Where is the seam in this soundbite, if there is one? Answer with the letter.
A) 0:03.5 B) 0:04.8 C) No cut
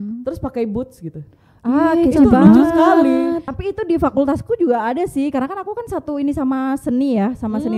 A